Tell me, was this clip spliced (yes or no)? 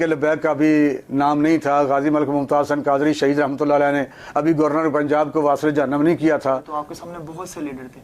yes